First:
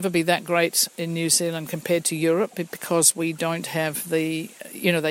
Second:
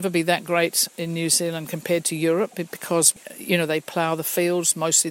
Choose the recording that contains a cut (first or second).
second